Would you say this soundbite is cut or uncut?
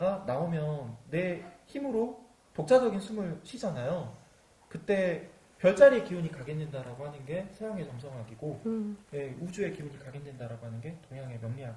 uncut